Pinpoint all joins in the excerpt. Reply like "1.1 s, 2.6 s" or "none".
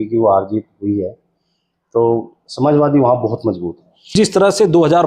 4.1 s